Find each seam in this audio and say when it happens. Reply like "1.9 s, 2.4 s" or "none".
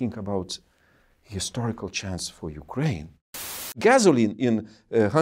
3.7 s

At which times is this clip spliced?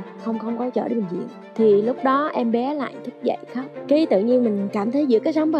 1.2 s

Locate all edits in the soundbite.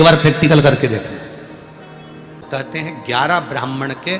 2.5 s

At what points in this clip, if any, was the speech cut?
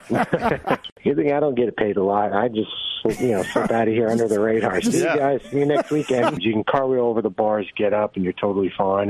none

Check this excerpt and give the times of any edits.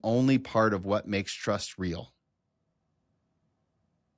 none

